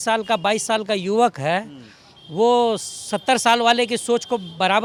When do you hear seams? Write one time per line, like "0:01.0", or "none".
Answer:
none